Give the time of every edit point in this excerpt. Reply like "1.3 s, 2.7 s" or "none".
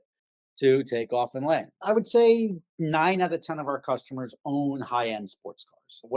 1.7 s